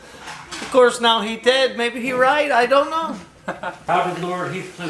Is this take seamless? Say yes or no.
no